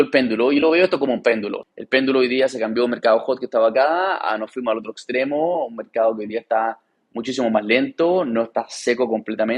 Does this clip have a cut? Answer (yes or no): yes